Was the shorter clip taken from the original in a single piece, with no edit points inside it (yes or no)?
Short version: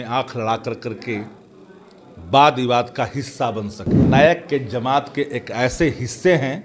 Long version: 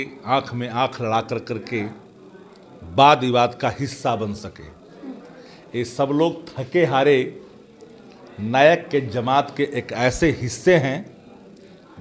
no